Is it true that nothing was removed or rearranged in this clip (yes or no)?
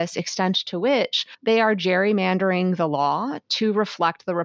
yes